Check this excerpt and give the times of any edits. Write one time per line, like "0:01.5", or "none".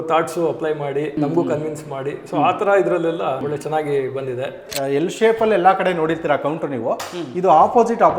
0:01.2
0:03.4
0:04.7